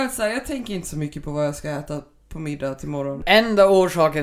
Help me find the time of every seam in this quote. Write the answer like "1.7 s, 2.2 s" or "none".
3.2 s